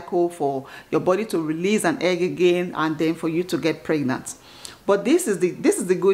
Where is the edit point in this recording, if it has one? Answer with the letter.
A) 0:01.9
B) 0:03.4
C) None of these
C